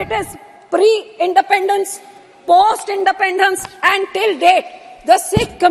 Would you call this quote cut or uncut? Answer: uncut